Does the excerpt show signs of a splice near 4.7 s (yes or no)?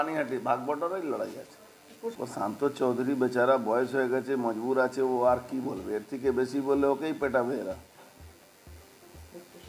no